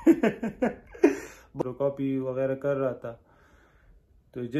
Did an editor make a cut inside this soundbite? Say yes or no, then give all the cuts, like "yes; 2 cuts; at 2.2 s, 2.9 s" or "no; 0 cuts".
yes; 1 cut; at 1.6 s